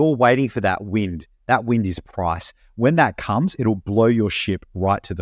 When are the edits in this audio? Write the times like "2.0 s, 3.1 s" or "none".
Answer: none